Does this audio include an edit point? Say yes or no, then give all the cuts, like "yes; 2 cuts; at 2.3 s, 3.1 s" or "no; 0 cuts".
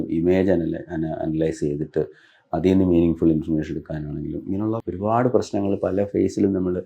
yes; 1 cut; at 4.8 s